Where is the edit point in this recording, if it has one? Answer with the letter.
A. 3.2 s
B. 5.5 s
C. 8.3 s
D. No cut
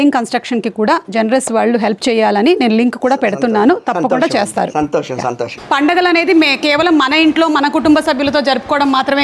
B